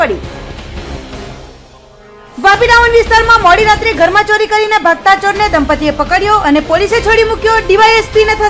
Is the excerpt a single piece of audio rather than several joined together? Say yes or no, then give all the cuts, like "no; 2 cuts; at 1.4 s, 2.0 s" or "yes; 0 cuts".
yes; 0 cuts